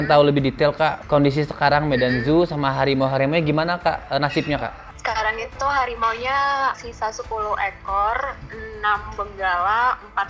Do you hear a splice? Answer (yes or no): no